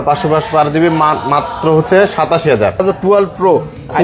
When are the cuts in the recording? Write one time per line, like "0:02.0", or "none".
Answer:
0:02.8